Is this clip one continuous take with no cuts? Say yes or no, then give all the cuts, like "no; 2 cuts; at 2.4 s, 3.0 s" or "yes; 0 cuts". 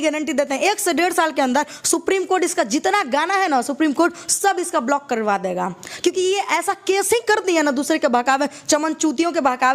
yes; 0 cuts